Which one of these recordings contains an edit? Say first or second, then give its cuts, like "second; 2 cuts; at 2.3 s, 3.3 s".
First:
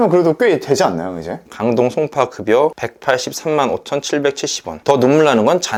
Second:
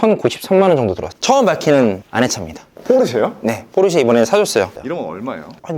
second; 2 cuts; at 1.1 s, 4.8 s